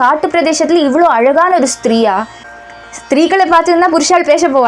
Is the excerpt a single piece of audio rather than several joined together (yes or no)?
no